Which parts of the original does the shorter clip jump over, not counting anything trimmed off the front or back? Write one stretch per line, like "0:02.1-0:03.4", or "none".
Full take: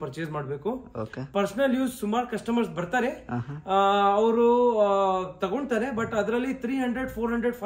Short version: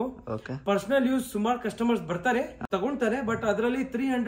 0:03.3-0:05.3